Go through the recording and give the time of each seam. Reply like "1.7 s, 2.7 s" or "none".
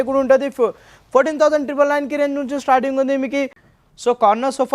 3.6 s